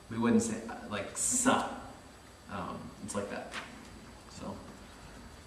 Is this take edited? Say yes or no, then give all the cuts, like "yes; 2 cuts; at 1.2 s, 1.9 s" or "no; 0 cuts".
yes; 1 cut; at 1.3 s